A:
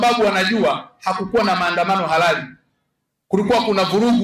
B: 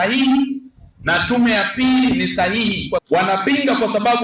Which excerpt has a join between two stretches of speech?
B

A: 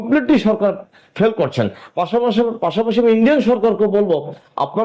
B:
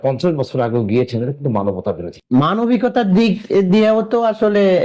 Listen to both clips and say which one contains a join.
B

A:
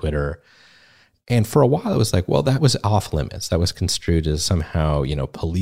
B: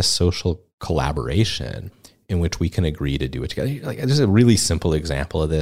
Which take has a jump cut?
A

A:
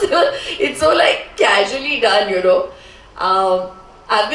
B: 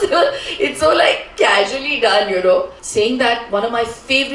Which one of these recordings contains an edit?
B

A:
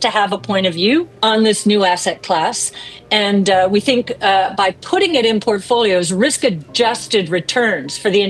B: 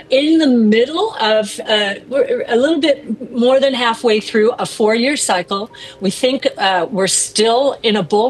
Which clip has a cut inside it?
A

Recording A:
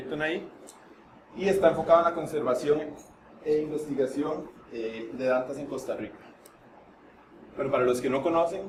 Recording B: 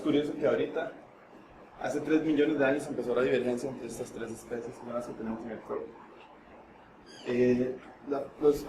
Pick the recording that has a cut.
B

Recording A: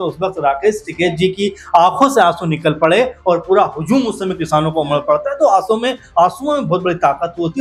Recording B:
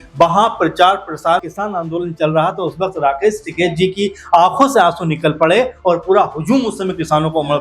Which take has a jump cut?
B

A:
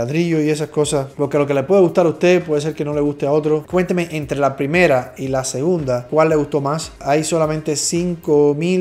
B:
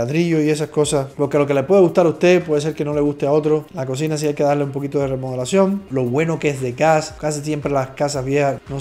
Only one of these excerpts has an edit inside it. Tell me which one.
A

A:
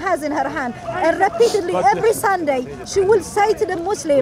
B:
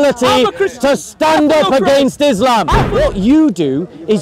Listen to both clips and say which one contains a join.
B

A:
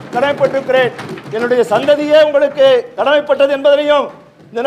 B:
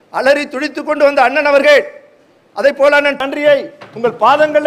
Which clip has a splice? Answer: B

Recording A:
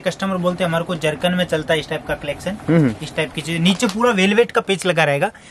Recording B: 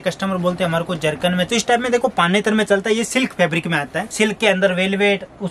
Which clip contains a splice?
B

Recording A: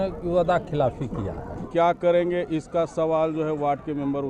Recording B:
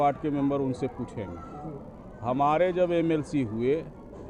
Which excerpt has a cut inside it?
A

